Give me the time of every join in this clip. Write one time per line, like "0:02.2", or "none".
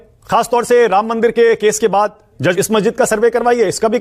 0:02.5